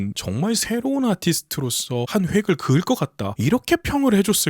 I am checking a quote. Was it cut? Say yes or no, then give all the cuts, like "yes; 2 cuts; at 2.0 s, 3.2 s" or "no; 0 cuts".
yes; 2 cuts; at 2.0 s, 3.3 s